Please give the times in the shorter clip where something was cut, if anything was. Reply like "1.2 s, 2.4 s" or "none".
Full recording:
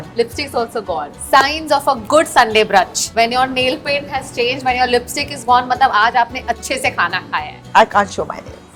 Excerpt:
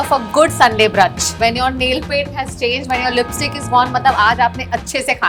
none